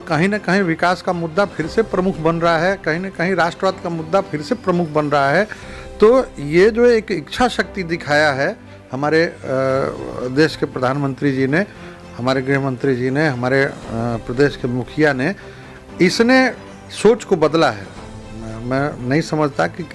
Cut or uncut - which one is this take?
uncut